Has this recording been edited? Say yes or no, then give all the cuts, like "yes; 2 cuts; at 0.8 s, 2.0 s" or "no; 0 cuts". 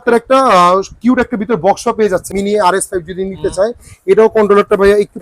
yes; 1 cut; at 2.3 s